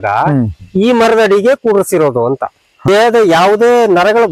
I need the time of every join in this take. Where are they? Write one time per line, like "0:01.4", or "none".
0:02.8